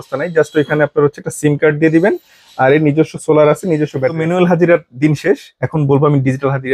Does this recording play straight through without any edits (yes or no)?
no